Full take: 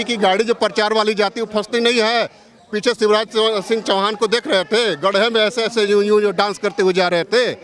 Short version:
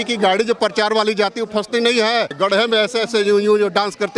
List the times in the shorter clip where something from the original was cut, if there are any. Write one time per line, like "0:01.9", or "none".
0:02.3